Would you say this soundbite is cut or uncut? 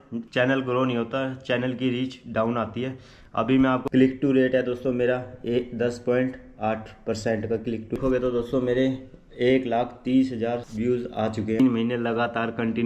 cut